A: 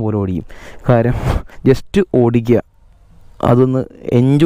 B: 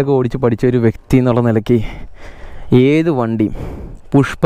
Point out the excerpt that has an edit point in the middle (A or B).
A